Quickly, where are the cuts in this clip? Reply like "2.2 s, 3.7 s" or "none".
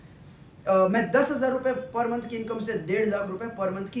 none